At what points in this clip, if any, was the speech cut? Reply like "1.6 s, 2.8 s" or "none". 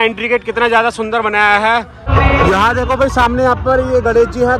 2.0 s